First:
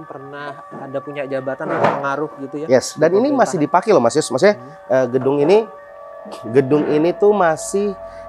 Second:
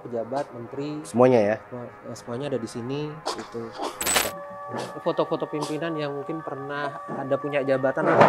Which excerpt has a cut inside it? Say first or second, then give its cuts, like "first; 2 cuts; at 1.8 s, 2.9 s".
second; 1 cut; at 4.4 s